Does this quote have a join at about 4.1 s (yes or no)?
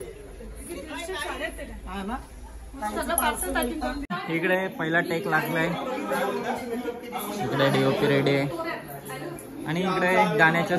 yes